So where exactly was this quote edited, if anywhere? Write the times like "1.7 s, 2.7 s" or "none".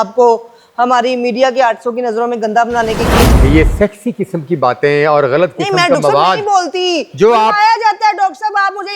3.3 s